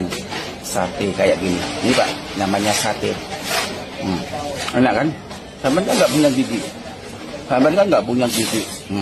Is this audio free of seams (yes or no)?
yes